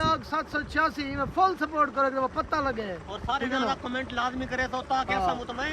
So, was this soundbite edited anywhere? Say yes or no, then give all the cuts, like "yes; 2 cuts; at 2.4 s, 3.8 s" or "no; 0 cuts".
no; 0 cuts